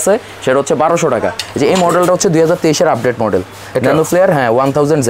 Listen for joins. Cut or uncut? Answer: cut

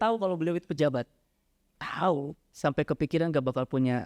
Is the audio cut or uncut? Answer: cut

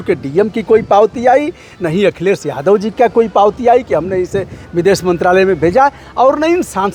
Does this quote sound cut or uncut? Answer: uncut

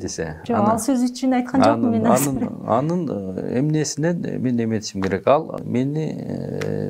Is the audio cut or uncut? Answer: cut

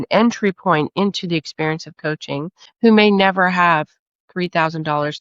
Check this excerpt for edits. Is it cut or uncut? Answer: uncut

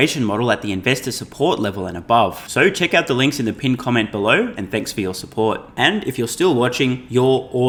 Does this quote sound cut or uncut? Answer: uncut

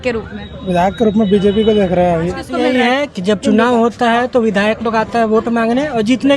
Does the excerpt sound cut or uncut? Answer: cut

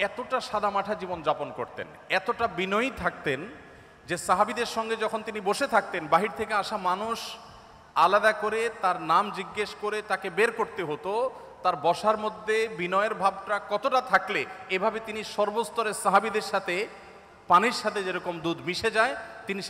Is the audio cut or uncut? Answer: uncut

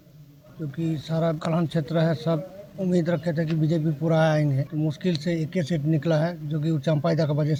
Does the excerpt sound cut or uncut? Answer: uncut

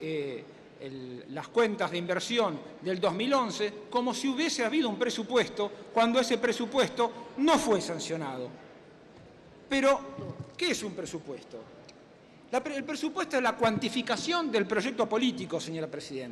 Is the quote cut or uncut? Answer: uncut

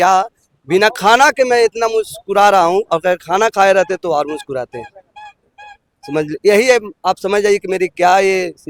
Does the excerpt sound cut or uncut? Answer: uncut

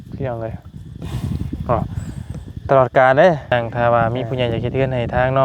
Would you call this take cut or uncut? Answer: cut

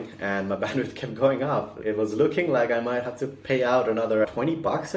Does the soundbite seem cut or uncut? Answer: cut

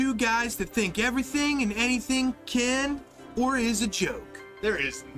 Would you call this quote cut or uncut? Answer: uncut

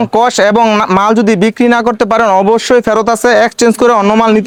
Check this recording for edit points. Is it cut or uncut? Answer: uncut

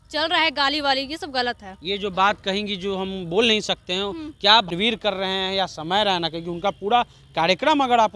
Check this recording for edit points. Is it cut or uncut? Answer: uncut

